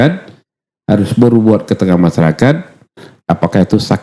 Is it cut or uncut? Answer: uncut